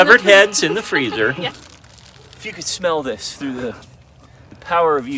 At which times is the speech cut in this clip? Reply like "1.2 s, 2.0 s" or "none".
1.4 s